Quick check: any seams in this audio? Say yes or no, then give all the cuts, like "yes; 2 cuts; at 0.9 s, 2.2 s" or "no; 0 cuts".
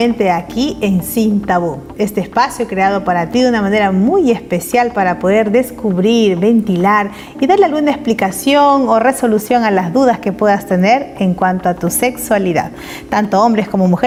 no; 0 cuts